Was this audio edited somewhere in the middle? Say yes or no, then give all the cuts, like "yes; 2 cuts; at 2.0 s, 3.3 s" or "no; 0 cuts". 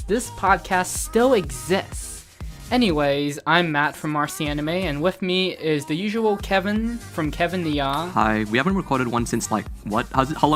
no; 0 cuts